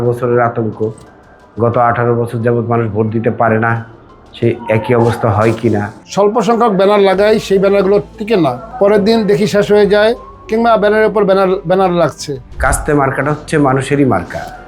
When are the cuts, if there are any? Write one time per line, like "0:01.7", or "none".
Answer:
0:06.0
0:08.6
0:12.5